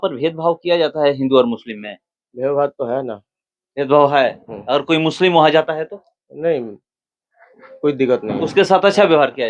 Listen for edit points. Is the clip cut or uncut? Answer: uncut